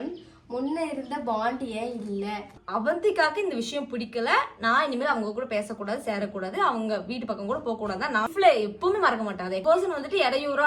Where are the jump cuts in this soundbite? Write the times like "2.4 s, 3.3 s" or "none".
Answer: 2.6 s, 8.3 s, 9.6 s